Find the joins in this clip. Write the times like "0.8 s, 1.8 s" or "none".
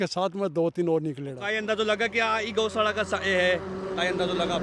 1.4 s